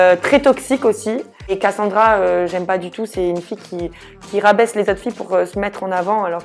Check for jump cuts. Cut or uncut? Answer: cut